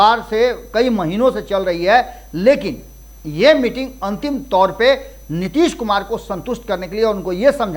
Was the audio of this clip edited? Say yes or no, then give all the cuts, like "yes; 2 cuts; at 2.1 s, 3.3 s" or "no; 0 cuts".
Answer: no; 0 cuts